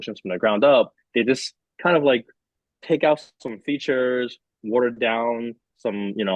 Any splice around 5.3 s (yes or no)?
no